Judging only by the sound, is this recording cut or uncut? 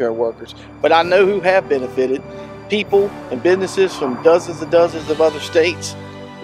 uncut